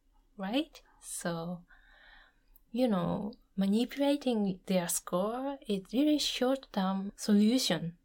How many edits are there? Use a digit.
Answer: 2